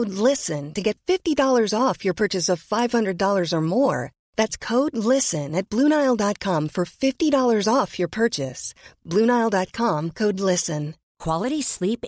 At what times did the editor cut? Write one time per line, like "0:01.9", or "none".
0:11.0